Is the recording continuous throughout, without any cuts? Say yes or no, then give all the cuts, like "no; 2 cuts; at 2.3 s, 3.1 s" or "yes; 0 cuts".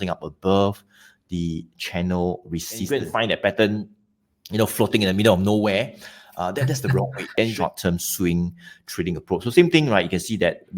no; 2 cuts; at 2.9 s, 7.4 s